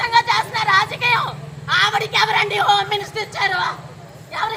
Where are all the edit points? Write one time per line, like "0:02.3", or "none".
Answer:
none